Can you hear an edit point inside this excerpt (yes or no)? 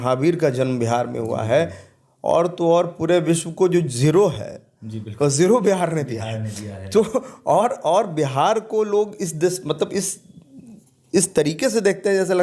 no